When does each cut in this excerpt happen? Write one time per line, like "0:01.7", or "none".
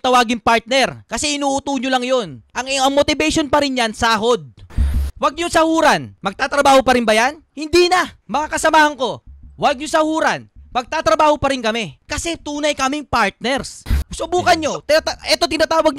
none